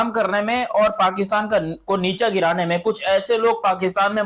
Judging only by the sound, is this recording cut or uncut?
uncut